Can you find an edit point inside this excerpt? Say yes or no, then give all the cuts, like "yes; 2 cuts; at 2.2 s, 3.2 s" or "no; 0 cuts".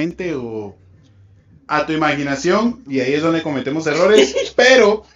no; 0 cuts